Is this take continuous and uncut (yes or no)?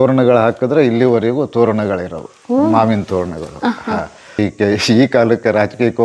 no